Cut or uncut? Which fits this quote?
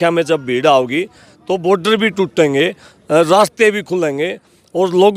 uncut